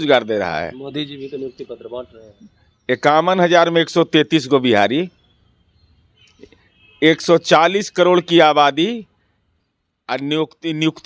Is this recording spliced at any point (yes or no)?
no